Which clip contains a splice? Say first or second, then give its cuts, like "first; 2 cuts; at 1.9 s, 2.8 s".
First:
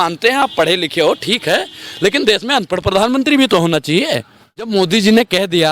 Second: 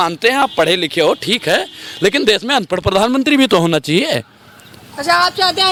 first; 1 cut; at 4.7 s